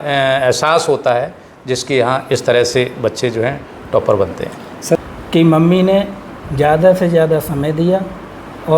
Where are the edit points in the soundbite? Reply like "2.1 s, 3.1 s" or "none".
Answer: 5.0 s